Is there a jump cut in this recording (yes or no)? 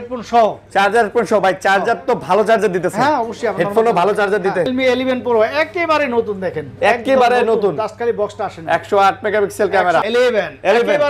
yes